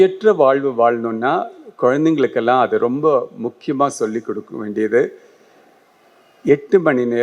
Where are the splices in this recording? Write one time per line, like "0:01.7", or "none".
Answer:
none